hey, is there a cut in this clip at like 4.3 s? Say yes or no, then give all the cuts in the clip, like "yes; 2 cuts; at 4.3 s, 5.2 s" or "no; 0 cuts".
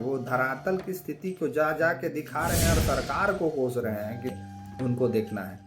yes; 1 cut; at 4.3 s